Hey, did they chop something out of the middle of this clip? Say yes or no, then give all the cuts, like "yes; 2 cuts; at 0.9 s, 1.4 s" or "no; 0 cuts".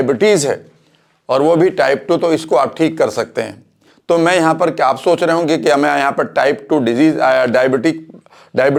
no; 0 cuts